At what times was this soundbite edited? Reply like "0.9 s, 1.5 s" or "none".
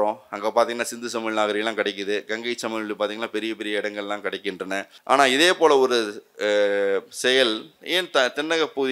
4.9 s